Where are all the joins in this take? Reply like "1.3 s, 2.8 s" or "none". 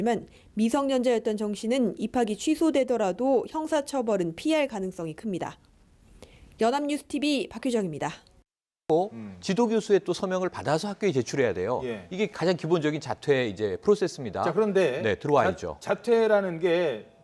9.3 s